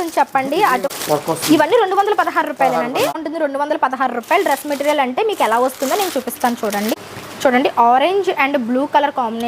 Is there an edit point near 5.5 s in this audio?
no; 3 cuts; at 0.9 s, 3.2 s, 6.9 s

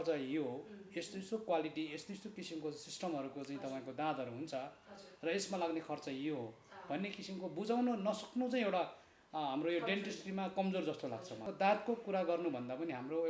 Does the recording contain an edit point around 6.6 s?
no; 1 cut; at 11.4 s

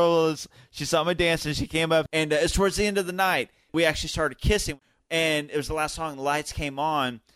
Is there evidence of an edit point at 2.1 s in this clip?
yes; 3 cuts; at 2.1 s, 3.6 s, 4.8 s

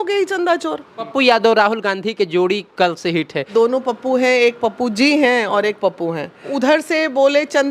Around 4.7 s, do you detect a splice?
no; 3 cuts; at 1.1 s, 3.5 s, 6.5 s

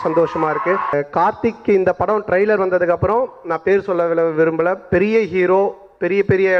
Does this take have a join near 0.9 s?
yes; 1 cut; at 0.9 s

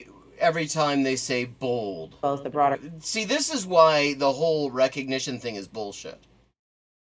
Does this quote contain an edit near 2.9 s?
yes; 1 cut; at 2.9 s

